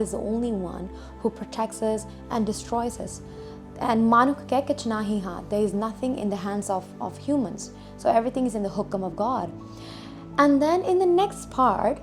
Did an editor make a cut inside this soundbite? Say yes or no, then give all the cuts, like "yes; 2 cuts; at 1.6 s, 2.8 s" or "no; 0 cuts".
no; 0 cuts